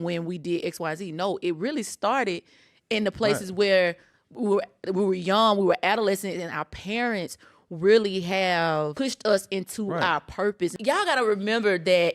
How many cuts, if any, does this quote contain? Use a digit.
2